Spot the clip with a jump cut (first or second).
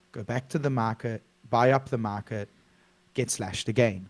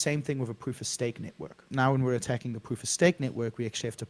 second